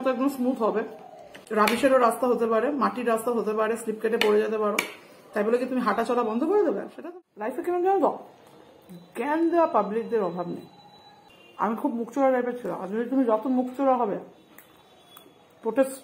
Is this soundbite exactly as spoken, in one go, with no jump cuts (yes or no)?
no